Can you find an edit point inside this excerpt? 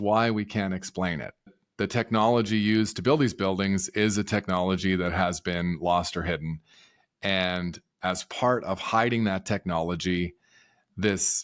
yes; 1 cut; at 1.5 s

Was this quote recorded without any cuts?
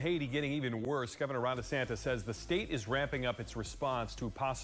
yes; 0 cuts

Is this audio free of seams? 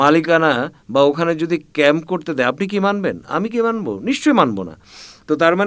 yes; 0 cuts

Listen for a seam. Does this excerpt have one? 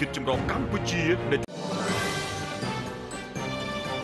no; 0 cuts

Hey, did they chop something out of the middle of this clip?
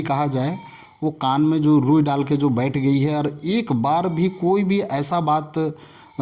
no; 0 cuts

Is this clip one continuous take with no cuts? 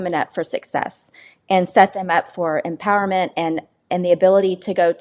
yes; 0 cuts

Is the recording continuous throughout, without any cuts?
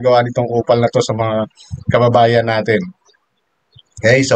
yes; 0 cuts

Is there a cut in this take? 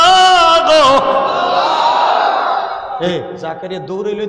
yes; 1 cut; at 2.9 s

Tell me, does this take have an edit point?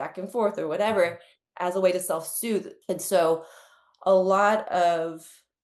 yes; 1 cut; at 2.8 s

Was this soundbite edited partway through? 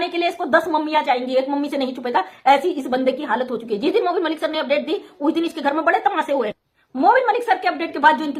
no; 0 cuts

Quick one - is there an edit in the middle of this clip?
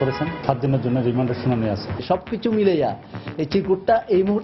yes; 1 cut; at 1.9 s

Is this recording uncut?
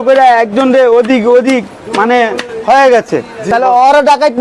no; 1 cut; at 3.4 s

